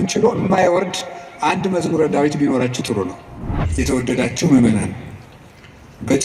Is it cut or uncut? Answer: cut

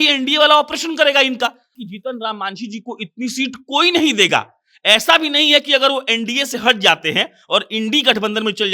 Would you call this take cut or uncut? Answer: cut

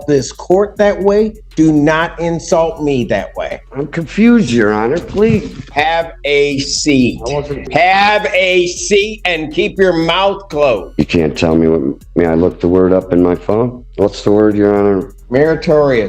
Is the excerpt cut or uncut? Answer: cut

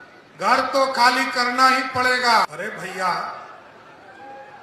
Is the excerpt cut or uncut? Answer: cut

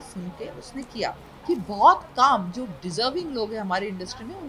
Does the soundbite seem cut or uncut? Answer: cut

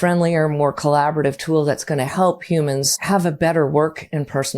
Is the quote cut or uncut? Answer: cut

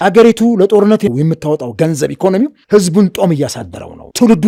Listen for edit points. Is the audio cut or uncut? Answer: uncut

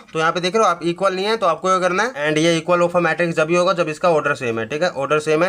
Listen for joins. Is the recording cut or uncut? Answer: cut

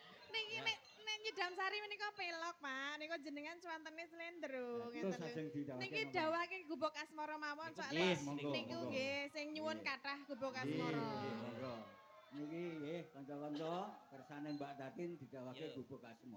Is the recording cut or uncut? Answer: uncut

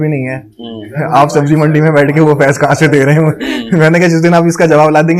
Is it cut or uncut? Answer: uncut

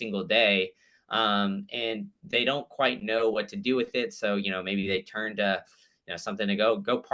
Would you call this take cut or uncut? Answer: uncut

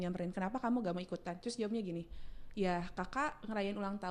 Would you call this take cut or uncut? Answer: uncut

